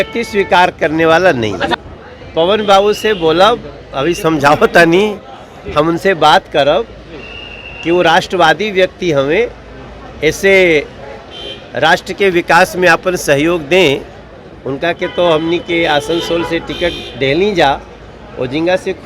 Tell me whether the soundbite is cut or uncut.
cut